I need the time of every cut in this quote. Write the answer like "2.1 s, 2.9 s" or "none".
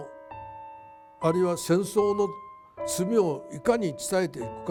none